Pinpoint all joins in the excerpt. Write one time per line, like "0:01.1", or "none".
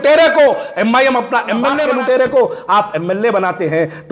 0:01.8